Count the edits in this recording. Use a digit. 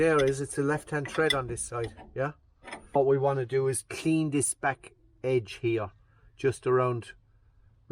1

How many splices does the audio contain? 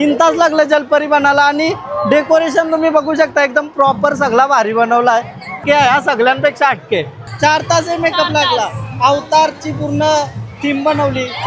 2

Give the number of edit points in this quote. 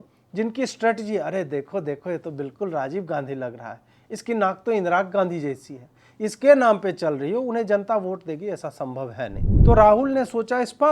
1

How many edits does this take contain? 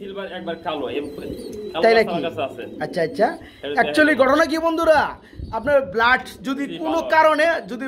0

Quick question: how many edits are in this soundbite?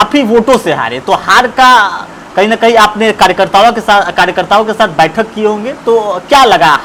0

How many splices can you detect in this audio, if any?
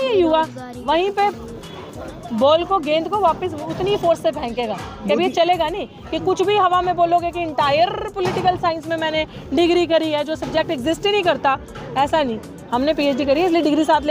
0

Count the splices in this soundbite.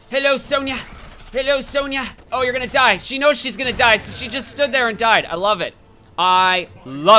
0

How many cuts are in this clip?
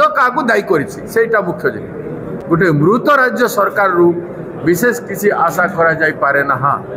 1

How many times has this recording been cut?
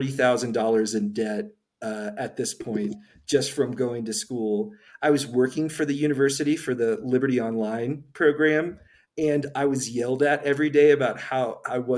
0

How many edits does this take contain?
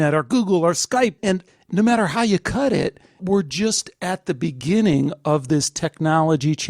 2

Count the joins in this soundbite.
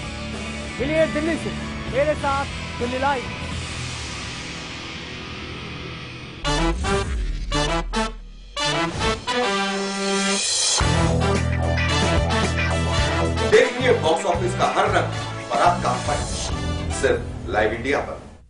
0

